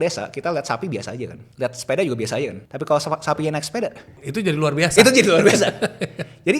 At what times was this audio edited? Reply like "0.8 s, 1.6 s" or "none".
1.4 s, 2.6 s, 4.2 s